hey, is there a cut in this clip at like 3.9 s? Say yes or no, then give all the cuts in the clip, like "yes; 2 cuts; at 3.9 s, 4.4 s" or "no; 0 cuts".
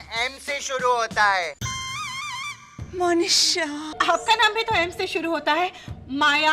yes; 1 cut; at 3.9 s